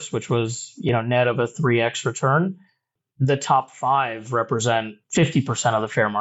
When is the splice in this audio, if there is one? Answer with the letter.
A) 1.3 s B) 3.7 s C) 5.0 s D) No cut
C